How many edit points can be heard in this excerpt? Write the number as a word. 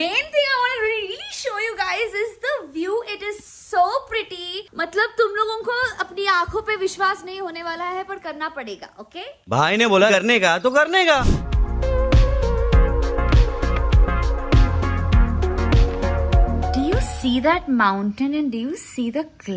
zero